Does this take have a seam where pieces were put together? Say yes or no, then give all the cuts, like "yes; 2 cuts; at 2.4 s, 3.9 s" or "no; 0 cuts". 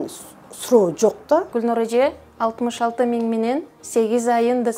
yes; 1 cut; at 1.5 s